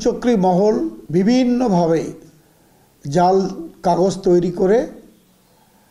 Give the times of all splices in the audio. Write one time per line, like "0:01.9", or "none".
0:01.0